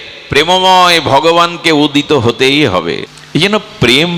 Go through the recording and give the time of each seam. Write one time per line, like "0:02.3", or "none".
0:03.1